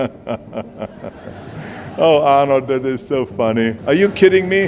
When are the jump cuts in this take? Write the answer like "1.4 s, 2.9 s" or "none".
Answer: 3.8 s